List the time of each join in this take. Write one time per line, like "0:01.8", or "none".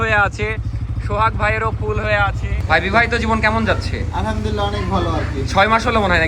0:02.5